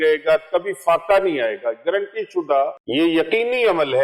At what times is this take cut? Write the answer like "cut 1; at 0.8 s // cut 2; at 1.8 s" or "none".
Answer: cut 1; at 2.8 s